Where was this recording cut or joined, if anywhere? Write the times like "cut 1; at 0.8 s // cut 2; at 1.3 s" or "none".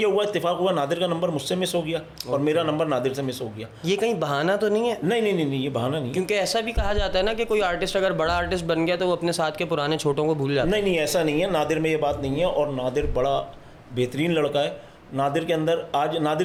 none

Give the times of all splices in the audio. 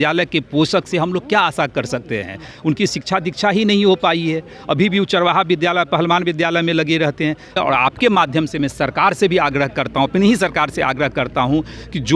cut 1; at 7.6 s

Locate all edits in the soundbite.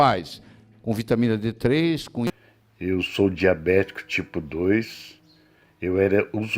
cut 1; at 2.3 s

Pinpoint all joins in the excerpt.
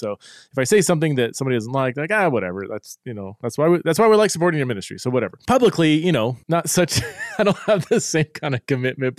cut 1; at 5.3 s // cut 2; at 6.4 s

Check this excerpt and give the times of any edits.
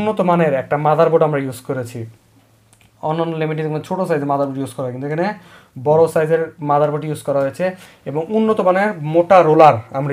none

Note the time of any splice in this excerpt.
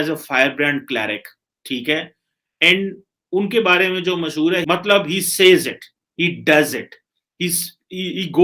cut 1; at 4.6 s

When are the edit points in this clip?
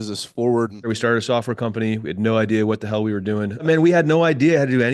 cut 1; at 0.9 s // cut 2; at 3.6 s

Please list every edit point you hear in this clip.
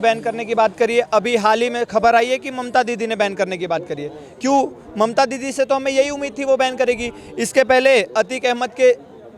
none

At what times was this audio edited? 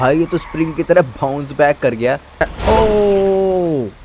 cut 1; at 2.5 s

